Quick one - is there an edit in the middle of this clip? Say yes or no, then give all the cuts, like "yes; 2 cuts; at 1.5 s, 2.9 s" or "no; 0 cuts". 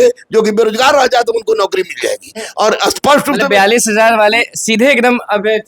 no; 0 cuts